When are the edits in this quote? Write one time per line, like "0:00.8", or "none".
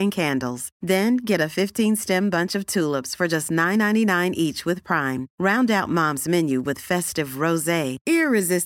none

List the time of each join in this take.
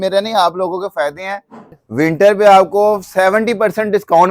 0:01.8

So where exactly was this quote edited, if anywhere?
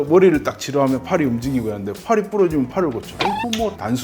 0:02.8

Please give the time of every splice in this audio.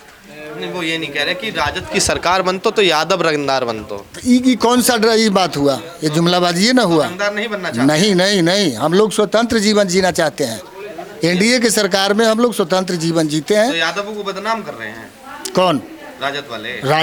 none

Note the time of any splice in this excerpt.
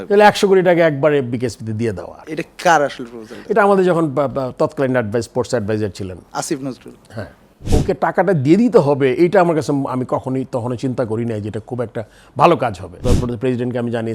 0:07.7
0:12.9

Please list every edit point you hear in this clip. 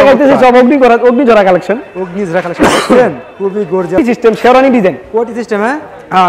0:04.0

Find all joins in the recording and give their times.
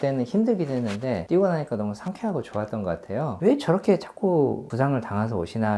0:01.2
0:02.7
0:04.7

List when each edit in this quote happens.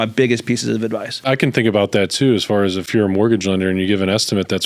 0:01.2
0:02.8

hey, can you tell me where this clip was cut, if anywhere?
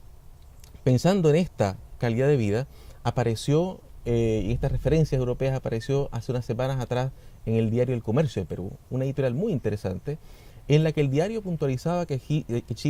0:05.3

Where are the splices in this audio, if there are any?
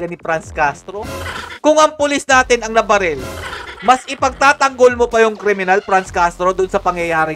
0:01.4

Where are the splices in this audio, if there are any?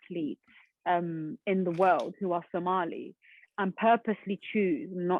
none

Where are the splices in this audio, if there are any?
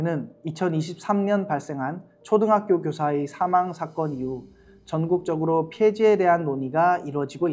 none

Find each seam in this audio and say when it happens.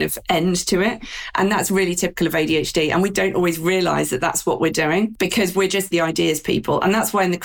0:03.1
0:05.7

